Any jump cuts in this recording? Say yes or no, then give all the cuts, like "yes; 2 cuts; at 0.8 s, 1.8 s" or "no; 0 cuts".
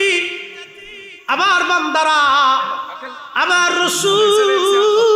no; 0 cuts